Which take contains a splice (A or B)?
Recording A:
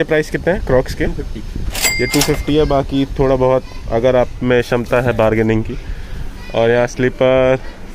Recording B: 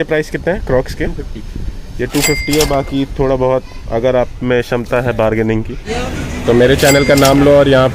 B